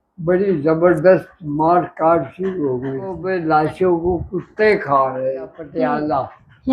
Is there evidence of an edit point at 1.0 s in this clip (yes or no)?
no